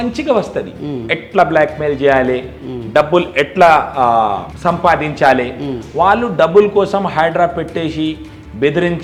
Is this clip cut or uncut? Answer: uncut